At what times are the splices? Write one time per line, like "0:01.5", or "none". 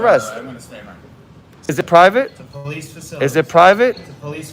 0:01.7